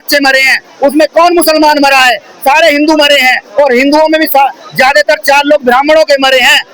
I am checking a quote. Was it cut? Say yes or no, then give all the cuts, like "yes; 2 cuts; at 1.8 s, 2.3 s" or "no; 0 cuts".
no; 0 cuts